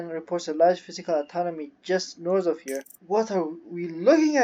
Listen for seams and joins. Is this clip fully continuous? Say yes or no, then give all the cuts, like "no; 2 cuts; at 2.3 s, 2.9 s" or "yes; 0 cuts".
no; 1 cut; at 2.9 s